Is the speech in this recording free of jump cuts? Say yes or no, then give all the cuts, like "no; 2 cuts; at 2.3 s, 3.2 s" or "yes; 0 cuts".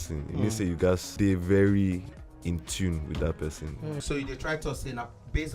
no; 2 cuts; at 1.1 s, 4.0 s